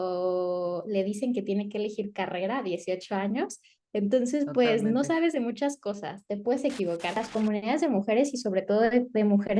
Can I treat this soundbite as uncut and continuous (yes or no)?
no